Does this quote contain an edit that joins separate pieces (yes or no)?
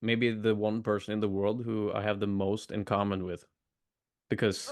no